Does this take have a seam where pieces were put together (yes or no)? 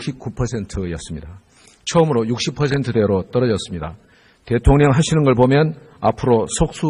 no